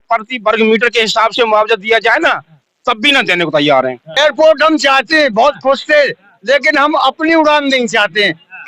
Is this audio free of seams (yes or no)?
no